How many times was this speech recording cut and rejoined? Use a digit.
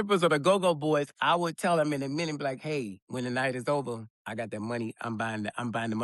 2